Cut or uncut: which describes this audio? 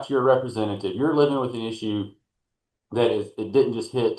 uncut